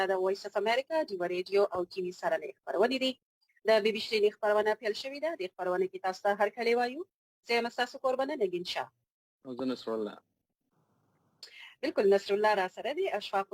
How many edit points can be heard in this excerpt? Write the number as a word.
zero